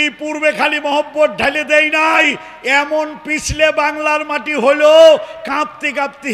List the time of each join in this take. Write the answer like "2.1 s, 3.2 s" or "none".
none